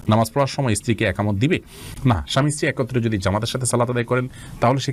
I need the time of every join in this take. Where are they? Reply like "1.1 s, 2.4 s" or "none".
none